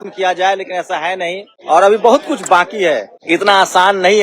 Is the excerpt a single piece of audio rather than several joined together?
no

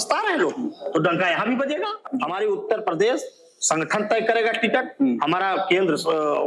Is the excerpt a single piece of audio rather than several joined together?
no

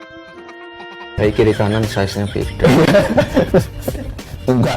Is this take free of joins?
no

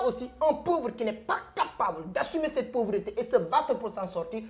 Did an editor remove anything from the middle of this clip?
no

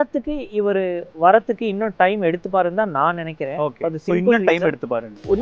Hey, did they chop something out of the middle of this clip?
no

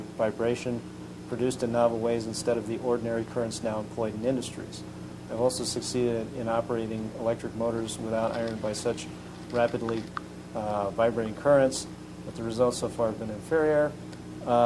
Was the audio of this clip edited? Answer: yes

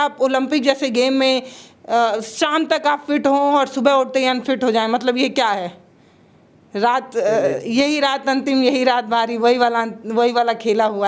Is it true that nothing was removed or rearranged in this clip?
yes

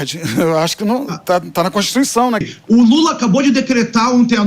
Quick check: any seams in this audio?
yes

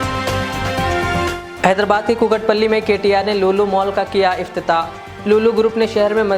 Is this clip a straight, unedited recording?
yes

